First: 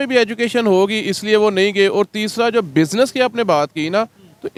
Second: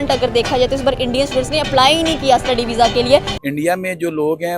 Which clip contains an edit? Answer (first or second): second